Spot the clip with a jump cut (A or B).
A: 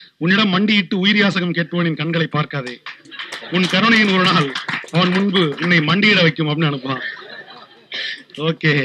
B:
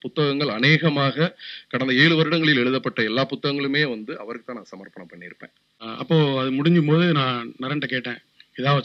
B